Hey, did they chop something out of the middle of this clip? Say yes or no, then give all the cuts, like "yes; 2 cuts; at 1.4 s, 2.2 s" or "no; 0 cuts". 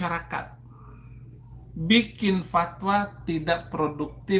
no; 0 cuts